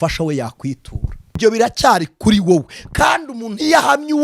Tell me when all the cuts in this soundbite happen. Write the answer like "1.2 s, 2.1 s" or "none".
1.4 s

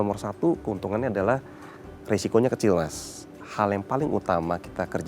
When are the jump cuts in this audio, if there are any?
3.4 s

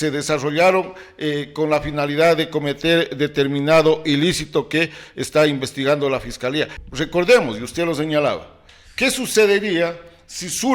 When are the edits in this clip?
6.8 s

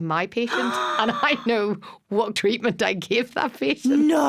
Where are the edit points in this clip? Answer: 2.3 s

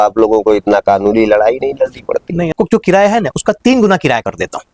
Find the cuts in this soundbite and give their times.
2.5 s

